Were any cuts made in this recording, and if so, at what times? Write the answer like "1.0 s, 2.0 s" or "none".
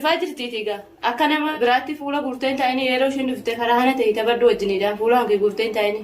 1.5 s